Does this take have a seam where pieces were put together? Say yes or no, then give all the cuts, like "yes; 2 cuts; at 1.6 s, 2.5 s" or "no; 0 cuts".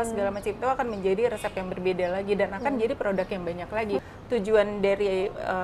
yes; 1 cut; at 4.0 s